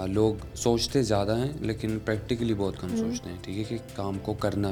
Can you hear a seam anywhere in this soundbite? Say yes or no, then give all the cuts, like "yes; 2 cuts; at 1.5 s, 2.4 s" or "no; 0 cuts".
no; 0 cuts